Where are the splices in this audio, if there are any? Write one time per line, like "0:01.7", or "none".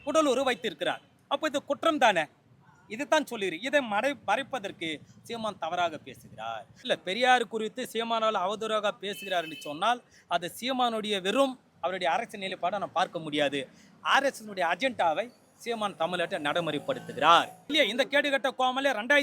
0:06.7
0:17.6